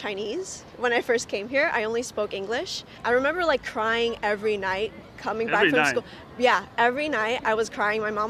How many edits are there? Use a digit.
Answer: 0